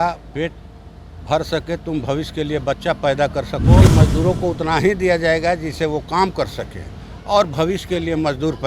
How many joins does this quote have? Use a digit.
1